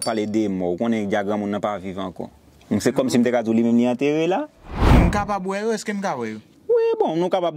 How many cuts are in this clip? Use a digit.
1